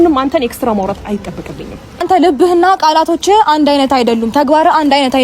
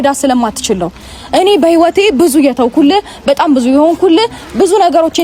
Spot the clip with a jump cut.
first; 1 cut; at 2.0 s

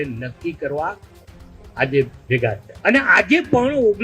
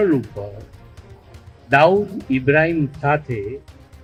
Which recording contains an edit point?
first; 1 cut; at 2.7 s

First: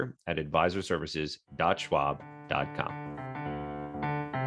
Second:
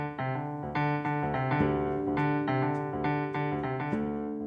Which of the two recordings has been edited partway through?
first; 1 cut; at 2.9 s

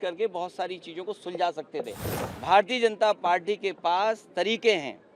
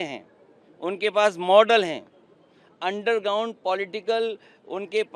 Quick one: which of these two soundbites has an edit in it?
first; 1 cut; at 2.0 s

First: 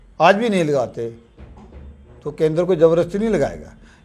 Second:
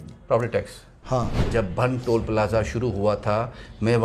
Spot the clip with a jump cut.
second; 1 cut; at 1.5 s

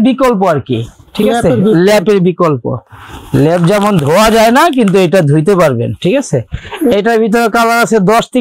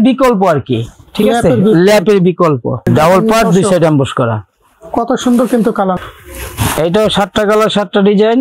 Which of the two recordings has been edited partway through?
second; 2 cuts; at 2.9 s, 5.9 s

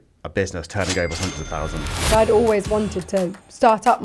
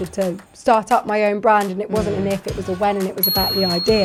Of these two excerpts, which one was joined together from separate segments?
first; 1 cut; at 2.1 s

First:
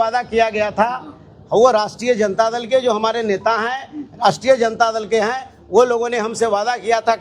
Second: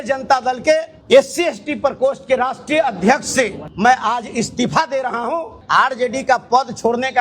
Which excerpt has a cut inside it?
second; 3 cuts; at 0.9 s, 3.6 s, 5.5 s

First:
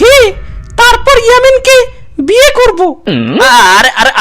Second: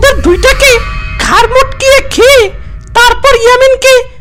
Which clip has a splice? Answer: first; 1 cut; at 3.3 s

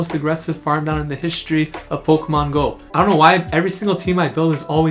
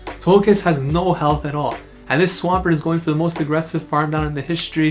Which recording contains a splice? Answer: first; 1 cut; at 2.8 s

